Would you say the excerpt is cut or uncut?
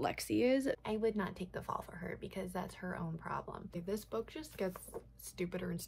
cut